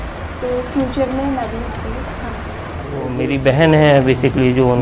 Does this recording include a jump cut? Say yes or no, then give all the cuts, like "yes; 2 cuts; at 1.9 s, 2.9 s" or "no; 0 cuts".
yes; 1 cut; at 3.2 s